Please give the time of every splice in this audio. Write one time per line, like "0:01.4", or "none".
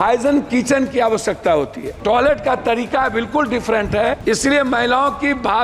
0:01.9
0:04.2